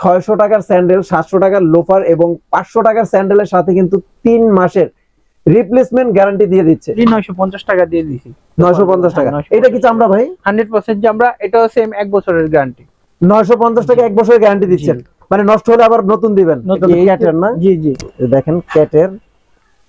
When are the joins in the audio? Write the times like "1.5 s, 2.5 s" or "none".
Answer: 7.0 s, 16.8 s